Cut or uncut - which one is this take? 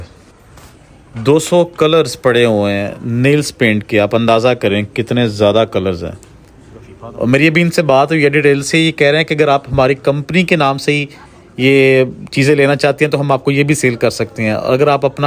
uncut